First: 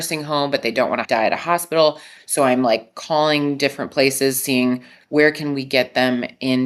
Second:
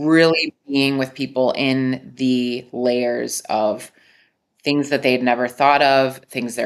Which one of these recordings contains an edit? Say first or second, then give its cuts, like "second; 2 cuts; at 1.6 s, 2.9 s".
first; 1 cut; at 1.0 s